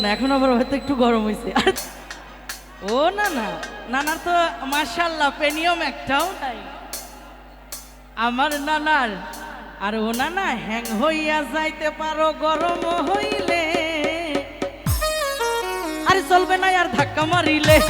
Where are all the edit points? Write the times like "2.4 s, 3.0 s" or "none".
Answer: 1.8 s